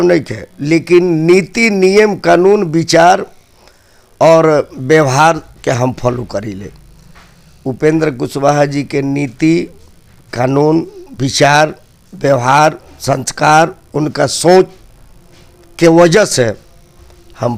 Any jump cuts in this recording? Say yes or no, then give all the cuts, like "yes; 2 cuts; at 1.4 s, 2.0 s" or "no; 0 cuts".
no; 0 cuts